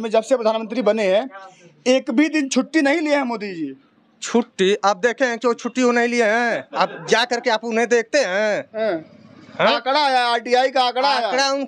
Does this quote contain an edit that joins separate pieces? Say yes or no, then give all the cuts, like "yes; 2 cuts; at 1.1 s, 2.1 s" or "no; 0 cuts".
no; 0 cuts